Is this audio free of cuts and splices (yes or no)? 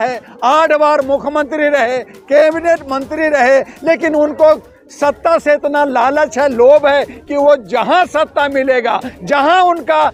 yes